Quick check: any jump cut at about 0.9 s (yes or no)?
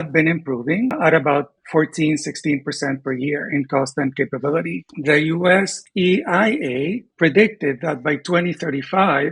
yes